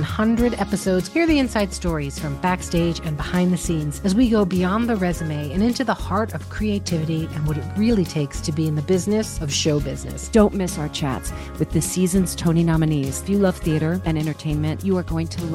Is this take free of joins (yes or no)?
yes